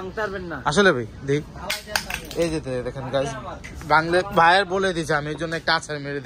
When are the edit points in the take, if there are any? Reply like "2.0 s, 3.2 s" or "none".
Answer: none